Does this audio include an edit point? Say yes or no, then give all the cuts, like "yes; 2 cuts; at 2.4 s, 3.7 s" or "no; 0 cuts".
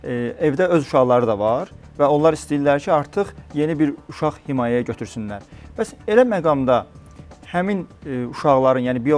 no; 0 cuts